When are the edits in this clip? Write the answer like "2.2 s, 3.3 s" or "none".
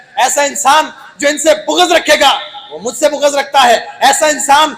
none